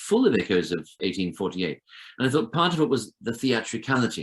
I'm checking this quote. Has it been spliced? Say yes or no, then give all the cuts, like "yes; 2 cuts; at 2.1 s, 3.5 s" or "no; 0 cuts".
yes; 1 cut; at 1.0 s